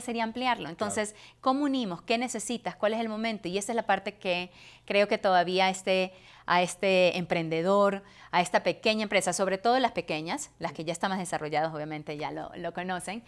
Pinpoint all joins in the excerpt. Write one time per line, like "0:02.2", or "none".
none